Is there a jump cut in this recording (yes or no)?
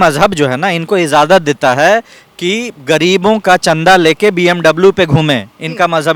no